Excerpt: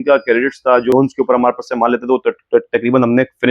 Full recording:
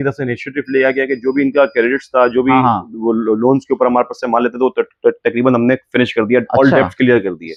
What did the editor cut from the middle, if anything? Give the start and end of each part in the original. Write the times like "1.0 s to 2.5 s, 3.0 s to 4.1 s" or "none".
2.4 s to 3.4 s